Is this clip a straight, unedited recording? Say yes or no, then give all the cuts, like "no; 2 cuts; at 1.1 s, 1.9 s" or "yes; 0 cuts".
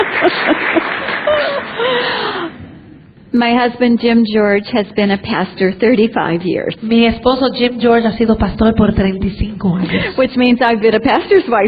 yes; 0 cuts